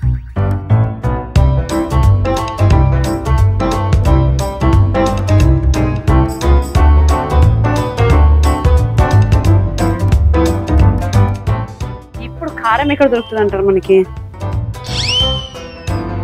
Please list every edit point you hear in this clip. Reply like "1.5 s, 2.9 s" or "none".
14.3 s